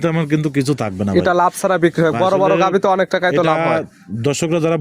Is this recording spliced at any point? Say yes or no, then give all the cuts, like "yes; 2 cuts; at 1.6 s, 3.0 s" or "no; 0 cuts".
no; 0 cuts